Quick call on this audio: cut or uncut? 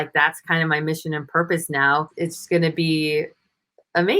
cut